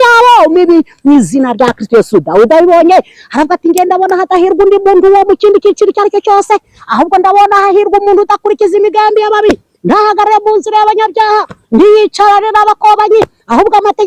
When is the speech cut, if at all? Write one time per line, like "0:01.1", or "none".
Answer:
none